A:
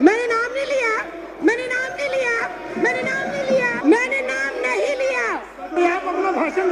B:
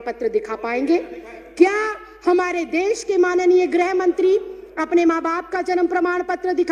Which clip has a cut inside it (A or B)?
A